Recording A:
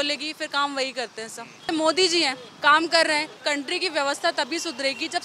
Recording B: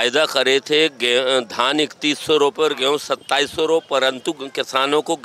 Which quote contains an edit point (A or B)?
A